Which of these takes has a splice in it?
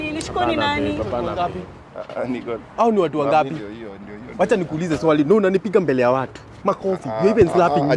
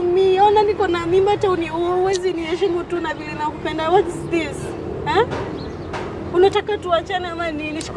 first; 1 cut; at 1.3 s

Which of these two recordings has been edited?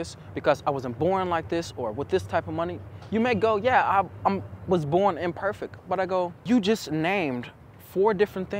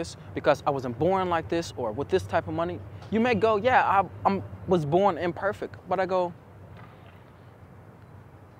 first; 1 cut; at 6.4 s

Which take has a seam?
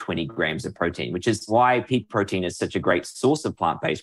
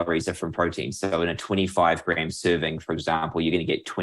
first; 1 cut; at 1.4 s

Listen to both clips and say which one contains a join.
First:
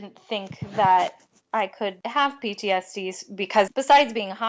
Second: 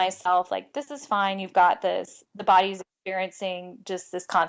first; 2 cuts; at 2.0 s, 3.7 s

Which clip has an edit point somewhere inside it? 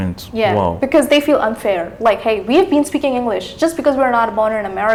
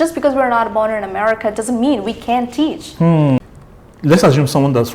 second; 1 cut; at 3.4 s

